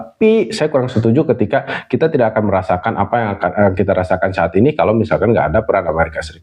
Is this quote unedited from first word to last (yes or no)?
yes